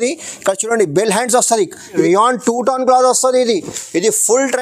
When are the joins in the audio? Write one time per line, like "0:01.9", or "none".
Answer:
0:01.9